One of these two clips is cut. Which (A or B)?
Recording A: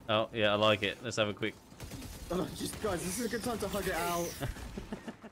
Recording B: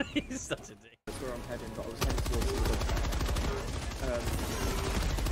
B